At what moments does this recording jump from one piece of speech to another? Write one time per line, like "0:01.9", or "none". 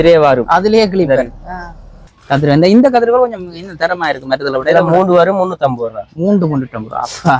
0:02.1

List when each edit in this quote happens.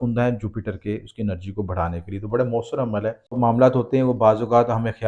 0:03.3

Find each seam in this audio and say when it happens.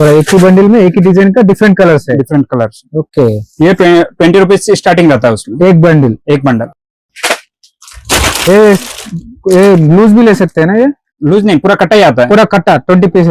none

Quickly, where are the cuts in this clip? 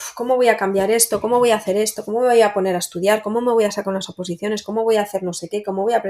none

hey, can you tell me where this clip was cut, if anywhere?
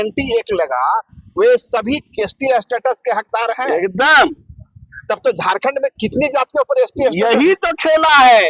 none

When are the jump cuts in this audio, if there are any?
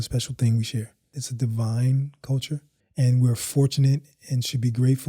0:01.2
0:02.8

